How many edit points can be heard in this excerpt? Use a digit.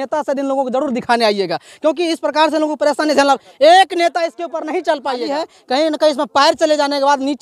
1